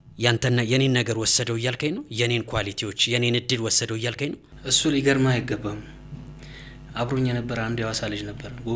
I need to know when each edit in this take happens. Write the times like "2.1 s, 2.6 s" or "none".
4.5 s